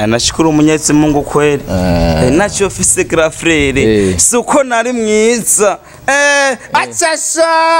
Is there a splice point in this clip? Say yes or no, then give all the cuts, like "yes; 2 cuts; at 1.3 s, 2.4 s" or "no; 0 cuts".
no; 0 cuts